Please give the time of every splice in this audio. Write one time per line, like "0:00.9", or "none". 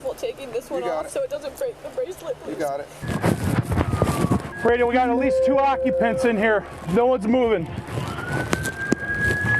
0:03.1